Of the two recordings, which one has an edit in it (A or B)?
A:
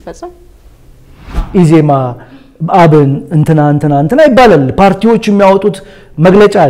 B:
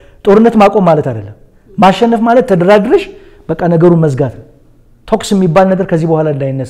A